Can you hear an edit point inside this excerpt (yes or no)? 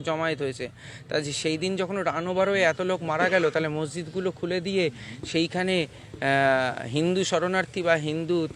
no